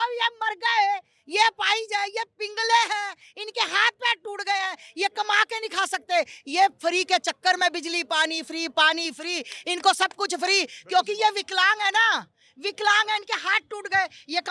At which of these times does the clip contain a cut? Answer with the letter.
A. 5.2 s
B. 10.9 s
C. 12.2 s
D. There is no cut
D